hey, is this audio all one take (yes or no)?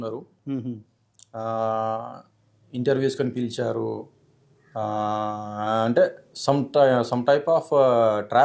yes